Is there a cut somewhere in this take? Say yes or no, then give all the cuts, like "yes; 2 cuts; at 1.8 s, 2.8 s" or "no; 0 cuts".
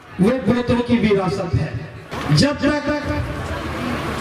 yes; 1 cut; at 2.1 s